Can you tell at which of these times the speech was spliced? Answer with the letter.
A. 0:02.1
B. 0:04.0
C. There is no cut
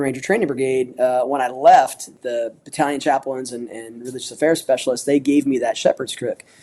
A